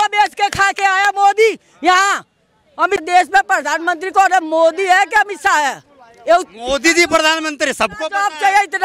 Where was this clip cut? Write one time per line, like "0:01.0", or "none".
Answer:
0:03.0